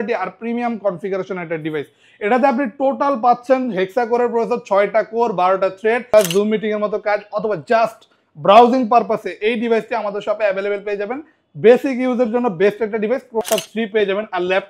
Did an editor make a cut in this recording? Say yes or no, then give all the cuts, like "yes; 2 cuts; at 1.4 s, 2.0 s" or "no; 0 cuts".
yes; 2 cuts; at 6.1 s, 13.4 s